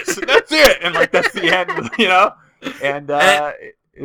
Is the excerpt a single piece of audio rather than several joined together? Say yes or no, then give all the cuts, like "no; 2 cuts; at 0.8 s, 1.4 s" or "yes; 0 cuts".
yes; 0 cuts